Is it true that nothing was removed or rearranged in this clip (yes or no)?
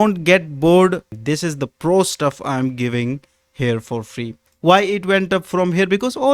no